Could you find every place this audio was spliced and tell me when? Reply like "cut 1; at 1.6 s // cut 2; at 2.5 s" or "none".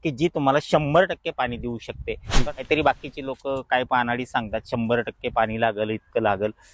cut 1; at 2.3 s